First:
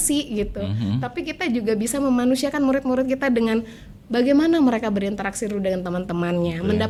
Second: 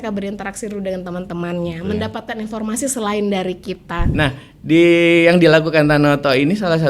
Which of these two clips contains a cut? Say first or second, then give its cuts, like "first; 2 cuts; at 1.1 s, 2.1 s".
second; 1 cut; at 4.0 s